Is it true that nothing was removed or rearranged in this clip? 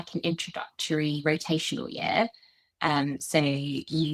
yes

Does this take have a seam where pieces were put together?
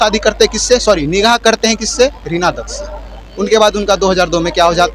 no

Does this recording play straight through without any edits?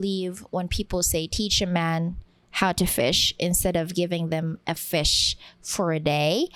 yes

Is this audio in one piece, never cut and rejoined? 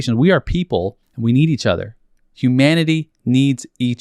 no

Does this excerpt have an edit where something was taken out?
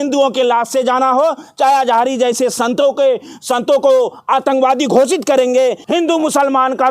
yes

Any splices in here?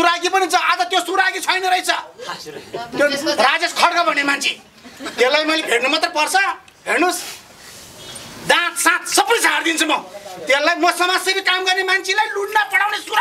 no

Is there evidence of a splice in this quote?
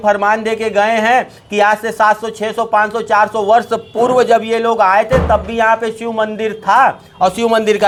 no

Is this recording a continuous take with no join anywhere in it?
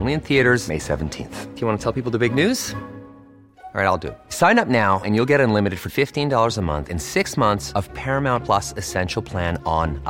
yes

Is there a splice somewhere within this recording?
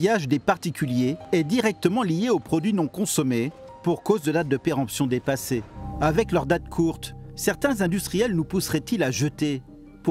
yes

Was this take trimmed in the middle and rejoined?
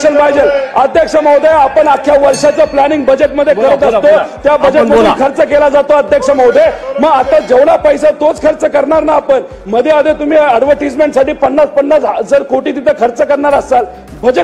no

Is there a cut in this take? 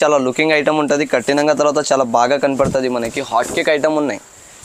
no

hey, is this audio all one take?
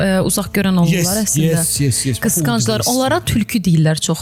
yes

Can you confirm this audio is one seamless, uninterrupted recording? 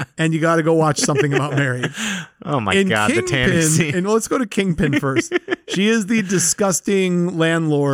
yes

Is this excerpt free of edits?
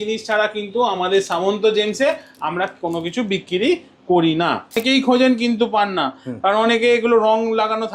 no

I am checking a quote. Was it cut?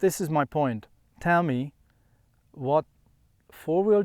no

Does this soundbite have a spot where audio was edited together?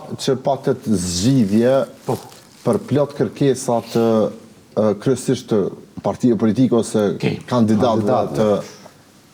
no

